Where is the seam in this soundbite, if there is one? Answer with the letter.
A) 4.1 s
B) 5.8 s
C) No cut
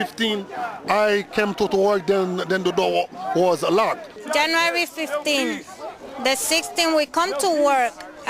A